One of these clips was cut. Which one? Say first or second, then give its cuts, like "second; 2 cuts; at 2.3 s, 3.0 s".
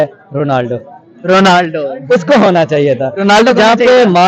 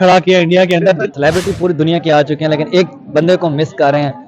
second; 1 cut; at 1.1 s